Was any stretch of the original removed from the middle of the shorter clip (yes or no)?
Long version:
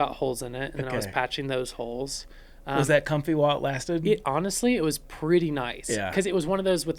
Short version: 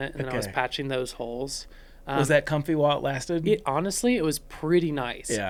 no